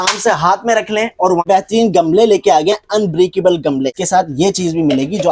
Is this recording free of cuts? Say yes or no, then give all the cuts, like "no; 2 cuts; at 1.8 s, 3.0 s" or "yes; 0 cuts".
no; 2 cuts; at 1.4 s, 4.0 s